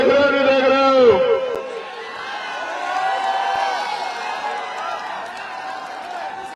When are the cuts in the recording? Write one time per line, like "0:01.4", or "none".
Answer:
none